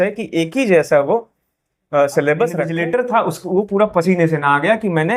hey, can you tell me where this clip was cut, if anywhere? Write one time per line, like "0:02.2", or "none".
0:02.7